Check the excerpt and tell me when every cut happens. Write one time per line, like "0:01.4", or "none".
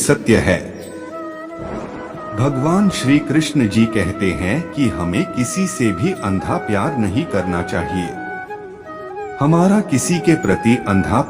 0:01.0
0:02.3